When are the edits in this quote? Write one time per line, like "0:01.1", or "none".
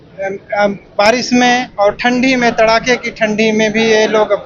none